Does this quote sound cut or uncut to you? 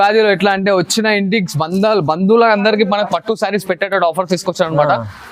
uncut